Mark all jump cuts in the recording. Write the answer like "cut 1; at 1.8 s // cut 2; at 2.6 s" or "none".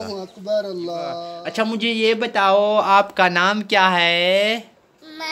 cut 1; at 1.4 s